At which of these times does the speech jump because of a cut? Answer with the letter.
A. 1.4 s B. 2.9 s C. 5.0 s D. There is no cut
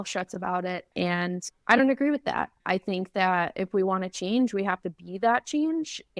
A